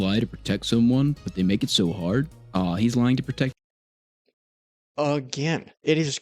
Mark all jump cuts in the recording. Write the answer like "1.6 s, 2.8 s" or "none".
3.5 s